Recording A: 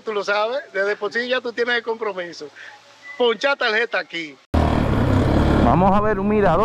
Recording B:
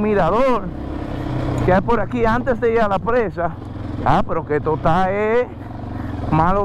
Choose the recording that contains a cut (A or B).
A